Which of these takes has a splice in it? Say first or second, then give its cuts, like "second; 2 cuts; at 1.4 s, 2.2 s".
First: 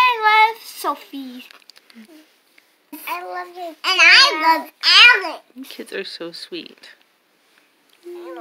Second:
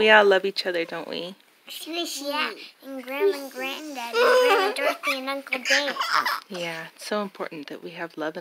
first; 1 cut; at 3.0 s